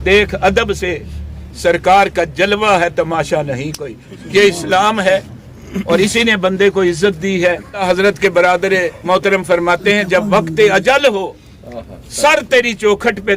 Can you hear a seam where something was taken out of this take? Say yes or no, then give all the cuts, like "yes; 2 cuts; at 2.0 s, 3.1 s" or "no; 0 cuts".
yes; 1 cut; at 7.8 s